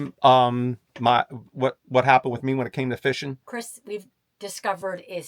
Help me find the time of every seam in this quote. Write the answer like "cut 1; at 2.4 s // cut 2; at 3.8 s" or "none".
none